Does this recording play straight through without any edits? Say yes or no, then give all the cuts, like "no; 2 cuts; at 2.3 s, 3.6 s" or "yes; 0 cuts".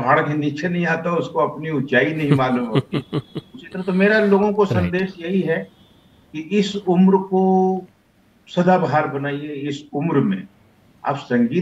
yes; 0 cuts